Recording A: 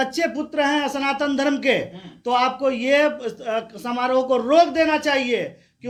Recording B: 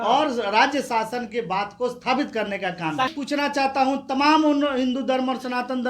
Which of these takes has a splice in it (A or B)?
B